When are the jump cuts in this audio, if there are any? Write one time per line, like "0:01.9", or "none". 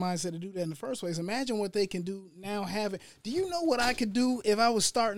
none